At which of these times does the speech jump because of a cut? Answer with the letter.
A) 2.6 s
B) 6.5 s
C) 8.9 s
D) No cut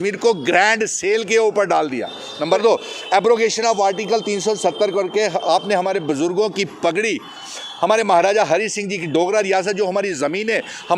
A